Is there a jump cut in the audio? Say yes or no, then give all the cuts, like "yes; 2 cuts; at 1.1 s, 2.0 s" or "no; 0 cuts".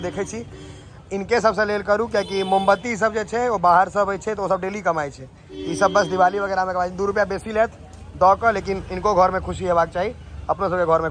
no; 0 cuts